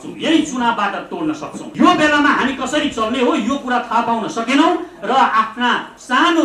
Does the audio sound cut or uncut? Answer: cut